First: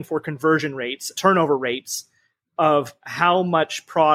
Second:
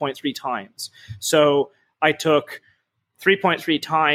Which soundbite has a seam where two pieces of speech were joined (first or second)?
first